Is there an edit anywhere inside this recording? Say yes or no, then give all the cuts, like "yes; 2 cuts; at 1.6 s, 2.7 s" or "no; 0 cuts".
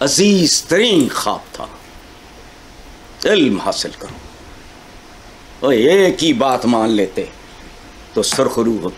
no; 0 cuts